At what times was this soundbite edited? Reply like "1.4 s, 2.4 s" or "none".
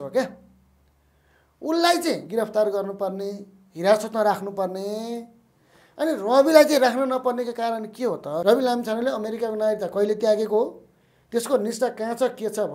8.4 s